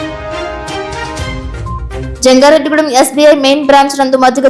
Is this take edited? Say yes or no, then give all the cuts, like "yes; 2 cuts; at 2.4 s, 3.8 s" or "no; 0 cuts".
no; 0 cuts